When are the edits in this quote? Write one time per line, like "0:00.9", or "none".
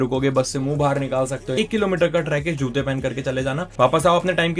0:01.6